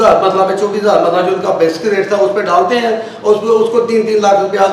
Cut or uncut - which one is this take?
uncut